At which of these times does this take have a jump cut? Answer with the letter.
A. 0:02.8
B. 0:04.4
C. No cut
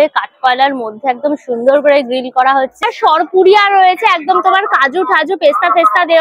A